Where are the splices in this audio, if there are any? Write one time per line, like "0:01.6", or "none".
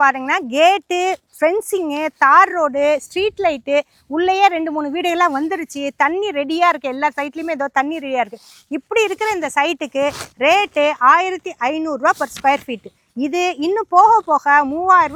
none